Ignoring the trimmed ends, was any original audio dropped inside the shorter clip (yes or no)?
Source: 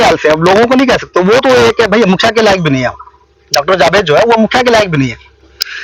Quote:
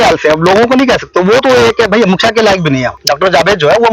yes